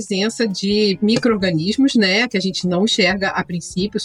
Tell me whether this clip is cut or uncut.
uncut